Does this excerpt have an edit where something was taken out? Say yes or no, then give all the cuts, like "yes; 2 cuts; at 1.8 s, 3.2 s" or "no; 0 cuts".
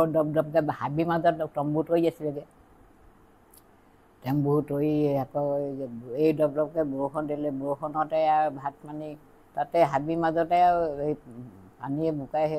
no; 0 cuts